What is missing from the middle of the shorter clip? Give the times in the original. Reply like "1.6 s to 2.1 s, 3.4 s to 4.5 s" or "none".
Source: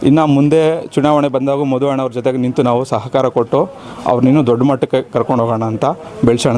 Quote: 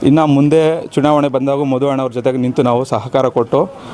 none